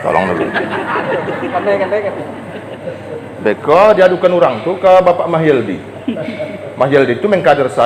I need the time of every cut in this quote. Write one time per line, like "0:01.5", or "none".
none